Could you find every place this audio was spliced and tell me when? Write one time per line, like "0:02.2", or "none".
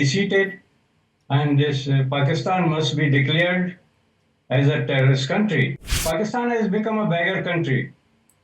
0:06.0